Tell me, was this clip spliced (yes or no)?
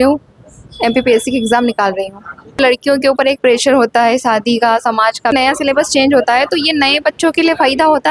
yes